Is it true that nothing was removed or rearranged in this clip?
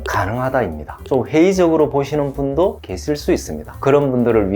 no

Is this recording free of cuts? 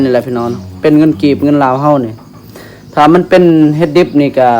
yes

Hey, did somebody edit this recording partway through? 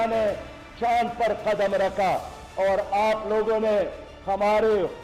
no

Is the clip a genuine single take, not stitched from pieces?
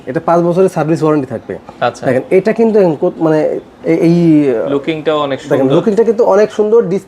yes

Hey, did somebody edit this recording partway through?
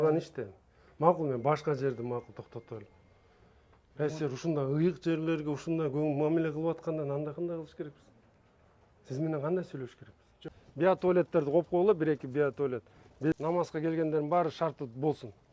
yes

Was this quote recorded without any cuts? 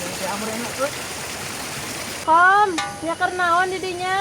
no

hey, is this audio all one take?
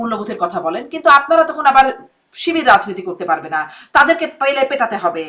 yes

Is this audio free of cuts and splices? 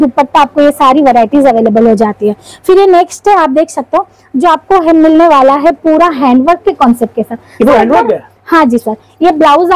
yes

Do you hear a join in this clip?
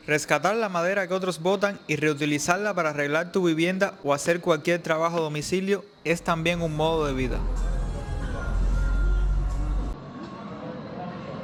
no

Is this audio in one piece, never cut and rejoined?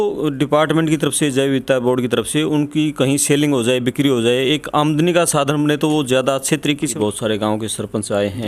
no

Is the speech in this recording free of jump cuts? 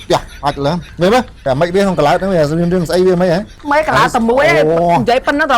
no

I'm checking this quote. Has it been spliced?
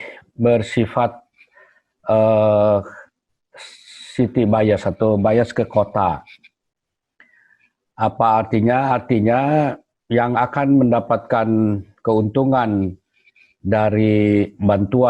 no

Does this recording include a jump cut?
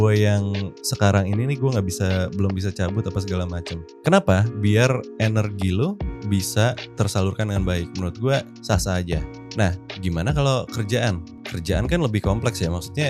no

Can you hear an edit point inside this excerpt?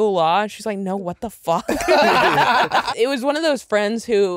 yes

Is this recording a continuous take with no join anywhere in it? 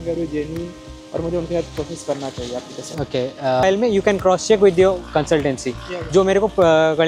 no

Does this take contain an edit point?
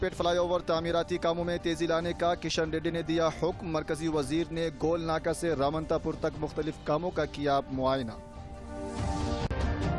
yes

